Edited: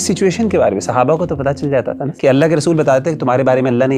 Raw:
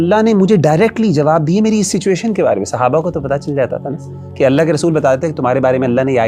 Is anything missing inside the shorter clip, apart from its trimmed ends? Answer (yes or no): yes